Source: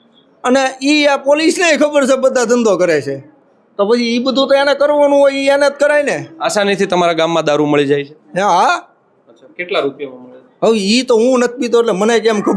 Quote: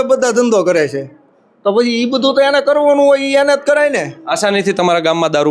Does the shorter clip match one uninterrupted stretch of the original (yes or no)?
yes